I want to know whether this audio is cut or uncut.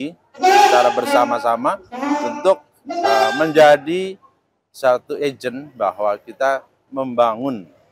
cut